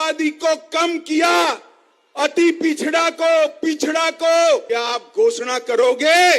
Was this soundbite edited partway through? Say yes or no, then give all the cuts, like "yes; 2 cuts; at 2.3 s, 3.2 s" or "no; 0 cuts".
yes; 1 cut; at 4.6 s